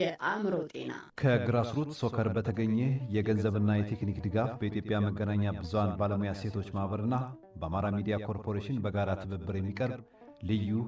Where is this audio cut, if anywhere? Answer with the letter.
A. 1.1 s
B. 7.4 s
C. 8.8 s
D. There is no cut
A